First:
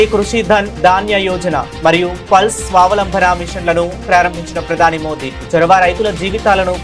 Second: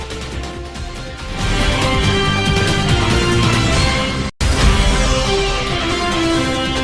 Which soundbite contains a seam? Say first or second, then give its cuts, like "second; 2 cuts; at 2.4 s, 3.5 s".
second; 1 cut; at 4.4 s